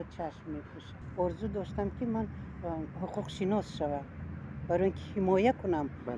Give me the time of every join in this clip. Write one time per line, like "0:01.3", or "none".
0:01.0